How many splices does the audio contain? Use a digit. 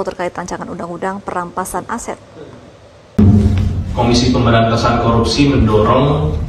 1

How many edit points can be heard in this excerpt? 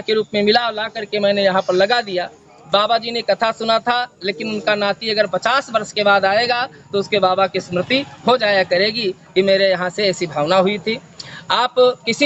0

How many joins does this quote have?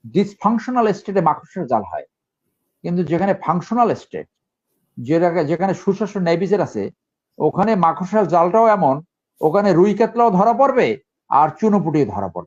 0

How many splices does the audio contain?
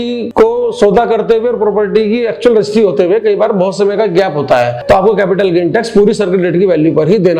1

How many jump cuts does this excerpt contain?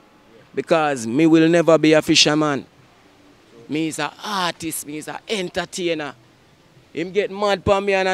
0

